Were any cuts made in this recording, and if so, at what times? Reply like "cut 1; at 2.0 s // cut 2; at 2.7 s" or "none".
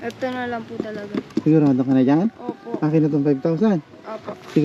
none